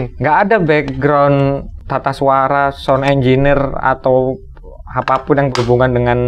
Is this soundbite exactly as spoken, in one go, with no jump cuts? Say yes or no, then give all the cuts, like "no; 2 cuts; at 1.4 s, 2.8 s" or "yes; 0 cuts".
no; 1 cut; at 1.7 s